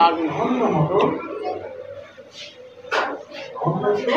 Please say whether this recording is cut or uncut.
uncut